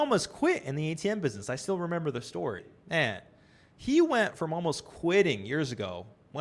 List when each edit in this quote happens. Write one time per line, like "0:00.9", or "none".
0:02.7